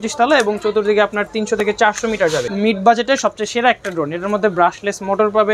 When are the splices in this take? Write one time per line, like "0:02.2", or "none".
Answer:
0:02.5